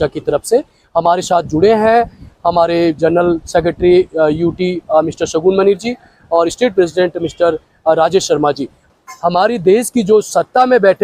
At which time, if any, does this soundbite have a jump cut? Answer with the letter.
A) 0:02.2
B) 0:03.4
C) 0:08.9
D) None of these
C